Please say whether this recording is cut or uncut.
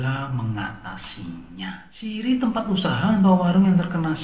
cut